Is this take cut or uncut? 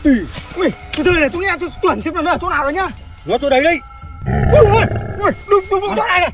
uncut